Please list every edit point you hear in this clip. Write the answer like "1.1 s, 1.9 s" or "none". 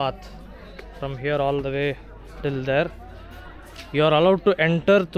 none